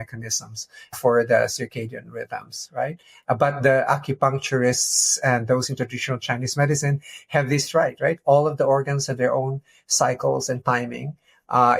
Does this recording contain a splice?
yes; 1 cut; at 0.9 s

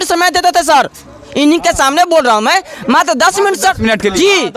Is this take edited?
no; 0 cuts

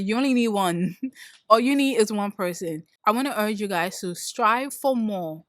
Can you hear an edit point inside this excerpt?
yes; 1 cut; at 2.9 s

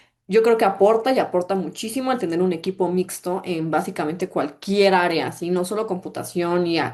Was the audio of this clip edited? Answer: no; 0 cuts

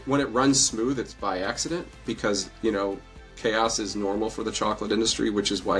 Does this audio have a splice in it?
no; 0 cuts

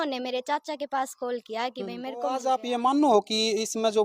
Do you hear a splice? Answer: yes; 1 cut; at 2.3 s

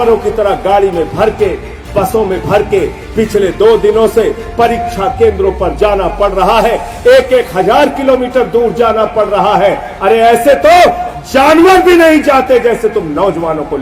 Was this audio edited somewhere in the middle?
no; 0 cuts

